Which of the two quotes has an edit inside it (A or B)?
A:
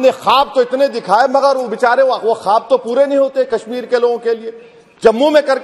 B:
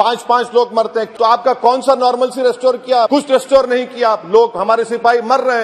B